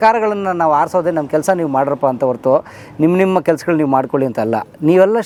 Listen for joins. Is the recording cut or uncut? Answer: uncut